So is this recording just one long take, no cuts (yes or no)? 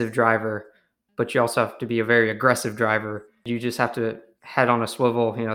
no